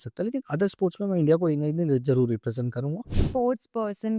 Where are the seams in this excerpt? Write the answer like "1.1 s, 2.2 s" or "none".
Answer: 3.1 s